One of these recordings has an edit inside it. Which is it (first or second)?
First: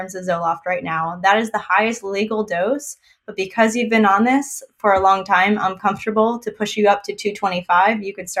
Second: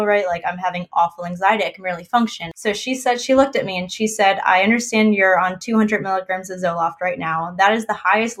second